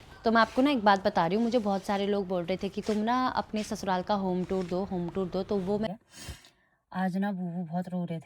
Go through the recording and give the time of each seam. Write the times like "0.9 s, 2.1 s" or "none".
5.9 s